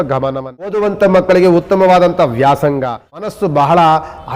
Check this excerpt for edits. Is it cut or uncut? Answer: cut